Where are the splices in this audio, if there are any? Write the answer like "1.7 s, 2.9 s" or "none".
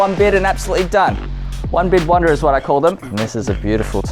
3.0 s